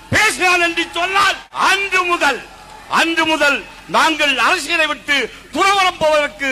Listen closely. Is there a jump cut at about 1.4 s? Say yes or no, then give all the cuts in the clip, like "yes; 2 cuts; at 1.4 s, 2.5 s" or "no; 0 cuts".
yes; 1 cut; at 1.4 s